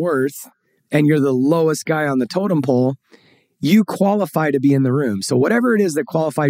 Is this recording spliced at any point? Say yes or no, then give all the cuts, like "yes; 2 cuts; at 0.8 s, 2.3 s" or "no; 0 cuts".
no; 0 cuts